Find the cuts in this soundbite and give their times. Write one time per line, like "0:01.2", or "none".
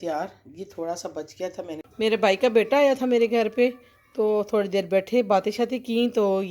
0:01.8